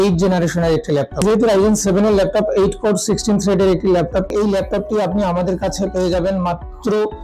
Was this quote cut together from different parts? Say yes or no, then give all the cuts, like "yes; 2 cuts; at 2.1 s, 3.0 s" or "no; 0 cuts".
yes; 2 cuts; at 1.2 s, 4.3 s